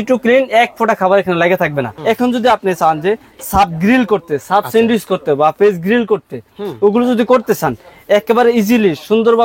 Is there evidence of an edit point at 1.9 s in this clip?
yes; 1 cut; at 1.9 s

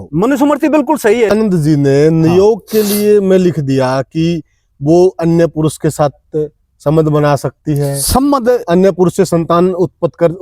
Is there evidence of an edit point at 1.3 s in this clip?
yes; 1 cut; at 1.3 s

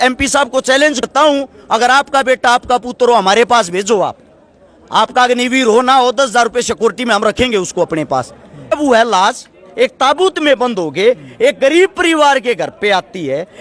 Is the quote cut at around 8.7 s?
yes; 2 cuts; at 1.0 s, 8.7 s

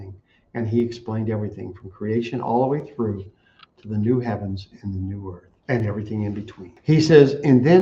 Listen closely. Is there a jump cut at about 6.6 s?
yes; 2 cuts; at 5.5 s, 6.6 s

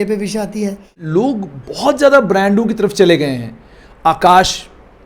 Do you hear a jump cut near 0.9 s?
yes; 1 cut; at 0.9 s

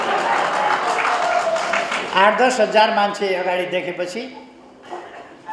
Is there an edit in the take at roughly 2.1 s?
no; 0 cuts

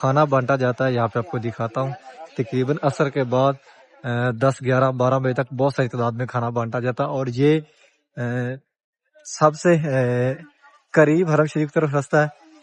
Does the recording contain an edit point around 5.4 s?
no; 0 cuts

